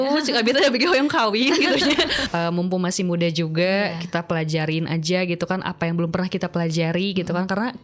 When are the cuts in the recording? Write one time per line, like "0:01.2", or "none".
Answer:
0:02.2